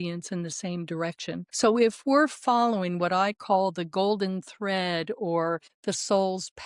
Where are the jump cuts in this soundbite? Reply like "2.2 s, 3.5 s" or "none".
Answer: 1.5 s, 5.7 s